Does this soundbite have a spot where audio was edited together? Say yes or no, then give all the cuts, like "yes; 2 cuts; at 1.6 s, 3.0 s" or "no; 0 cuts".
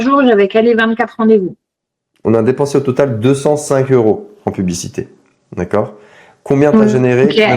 yes; 1 cut; at 2.1 s